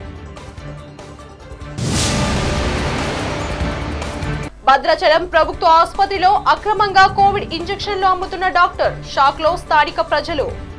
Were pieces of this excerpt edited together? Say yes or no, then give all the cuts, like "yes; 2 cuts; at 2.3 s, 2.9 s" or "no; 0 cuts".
yes; 2 cuts; at 1.7 s, 4.4 s